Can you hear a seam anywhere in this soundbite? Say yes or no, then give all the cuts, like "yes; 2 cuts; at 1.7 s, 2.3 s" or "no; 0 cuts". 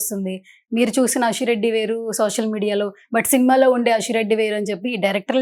no; 0 cuts